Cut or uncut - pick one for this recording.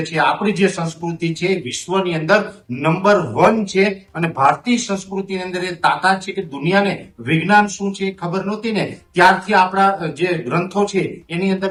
uncut